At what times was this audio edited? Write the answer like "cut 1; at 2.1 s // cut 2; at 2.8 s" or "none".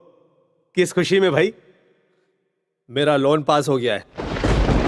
cut 1; at 3.7 s